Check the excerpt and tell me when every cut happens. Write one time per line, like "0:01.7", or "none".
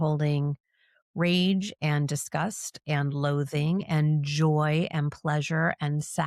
none